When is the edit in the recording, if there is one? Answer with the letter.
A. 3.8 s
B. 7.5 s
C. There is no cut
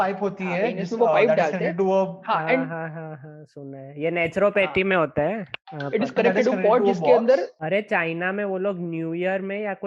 B